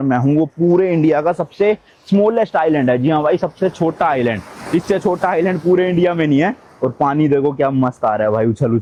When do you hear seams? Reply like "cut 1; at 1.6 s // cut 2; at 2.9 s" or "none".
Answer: none